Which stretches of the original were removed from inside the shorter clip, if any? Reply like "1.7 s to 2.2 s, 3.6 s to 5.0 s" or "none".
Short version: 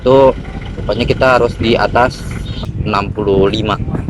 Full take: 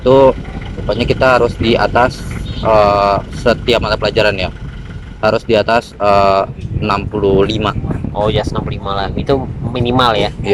2.6 s to 6.5 s